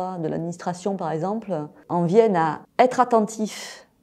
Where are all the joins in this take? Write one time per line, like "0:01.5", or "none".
0:01.7
0:02.6